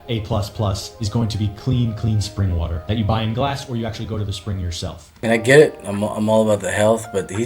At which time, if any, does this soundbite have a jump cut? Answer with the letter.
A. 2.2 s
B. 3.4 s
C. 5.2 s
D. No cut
D